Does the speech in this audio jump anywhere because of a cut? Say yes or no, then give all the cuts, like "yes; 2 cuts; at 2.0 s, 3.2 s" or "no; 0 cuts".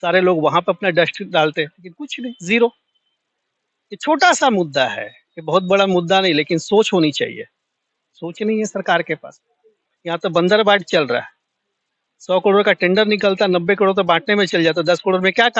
no; 0 cuts